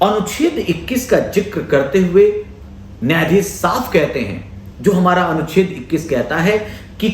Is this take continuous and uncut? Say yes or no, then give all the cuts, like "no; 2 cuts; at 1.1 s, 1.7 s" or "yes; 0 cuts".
yes; 0 cuts